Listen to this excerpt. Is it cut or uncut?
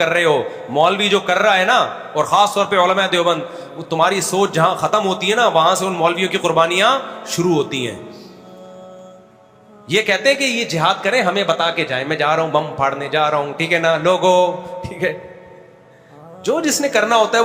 uncut